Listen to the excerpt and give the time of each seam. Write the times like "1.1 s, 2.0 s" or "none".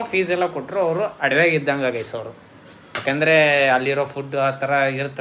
none